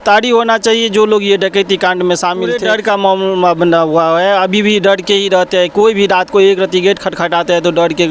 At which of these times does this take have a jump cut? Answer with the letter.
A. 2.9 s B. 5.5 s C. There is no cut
A